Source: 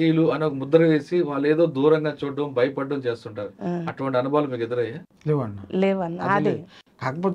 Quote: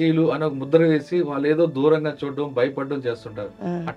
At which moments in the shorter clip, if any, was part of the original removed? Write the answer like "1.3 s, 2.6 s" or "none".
none